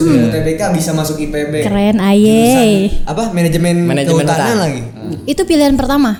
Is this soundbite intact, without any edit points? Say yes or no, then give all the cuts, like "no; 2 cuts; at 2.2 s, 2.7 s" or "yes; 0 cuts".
yes; 0 cuts